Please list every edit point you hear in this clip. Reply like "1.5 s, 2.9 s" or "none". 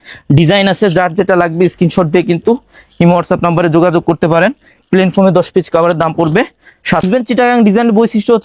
7.0 s